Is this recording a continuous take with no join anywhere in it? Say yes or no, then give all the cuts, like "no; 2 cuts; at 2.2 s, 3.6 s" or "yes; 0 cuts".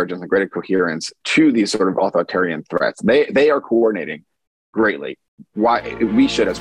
yes; 0 cuts